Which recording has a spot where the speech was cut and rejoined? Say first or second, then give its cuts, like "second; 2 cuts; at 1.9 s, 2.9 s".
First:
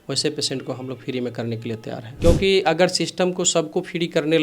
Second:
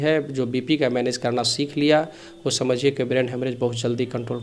first; 1 cut; at 2.1 s